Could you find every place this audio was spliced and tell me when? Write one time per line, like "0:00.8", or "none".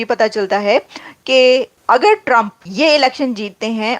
0:01.7
0:02.6